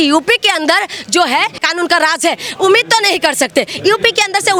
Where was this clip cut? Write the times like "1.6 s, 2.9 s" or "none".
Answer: none